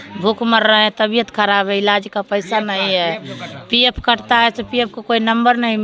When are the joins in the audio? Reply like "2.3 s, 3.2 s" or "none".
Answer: none